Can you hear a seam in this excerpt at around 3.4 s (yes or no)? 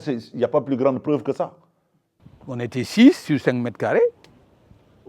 no